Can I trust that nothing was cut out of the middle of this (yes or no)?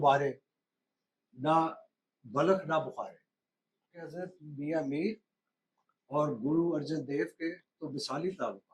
no